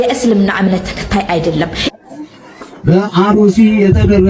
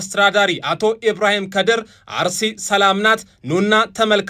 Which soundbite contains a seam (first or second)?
first